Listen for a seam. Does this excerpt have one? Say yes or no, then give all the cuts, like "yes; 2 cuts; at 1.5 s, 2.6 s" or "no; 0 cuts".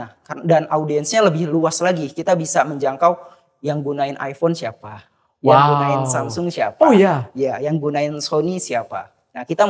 no; 0 cuts